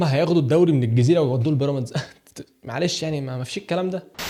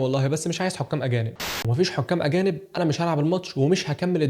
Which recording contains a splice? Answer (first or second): second